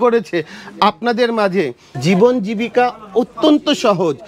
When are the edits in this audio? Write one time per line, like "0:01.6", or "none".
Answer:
0:01.9

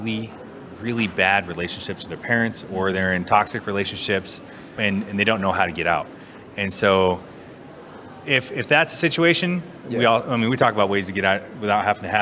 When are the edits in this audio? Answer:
none

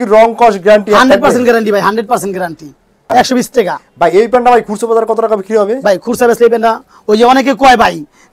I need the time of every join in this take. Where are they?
0:03.1

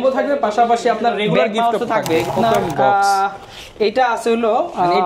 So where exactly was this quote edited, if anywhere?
0:02.3

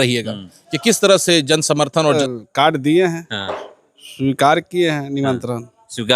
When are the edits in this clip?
0:02.2

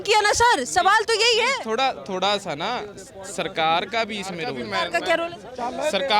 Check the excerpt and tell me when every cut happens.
0:04.6

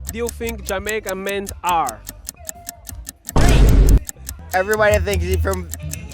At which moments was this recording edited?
0:03.3
0:04.4

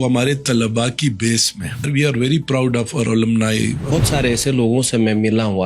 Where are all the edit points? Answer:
0:01.9
0:03.9

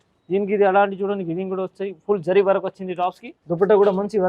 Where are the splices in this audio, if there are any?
0:03.3

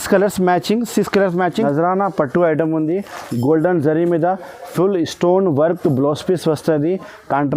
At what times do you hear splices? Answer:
0:01.7

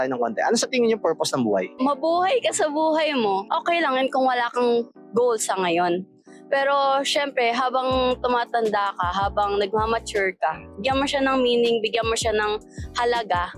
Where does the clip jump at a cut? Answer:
none

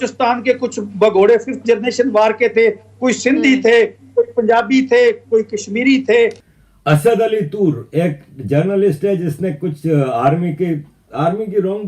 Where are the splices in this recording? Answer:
0:06.5

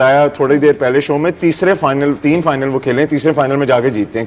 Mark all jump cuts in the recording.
none

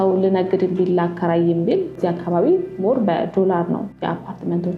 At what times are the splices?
0:02.0
0:03.9

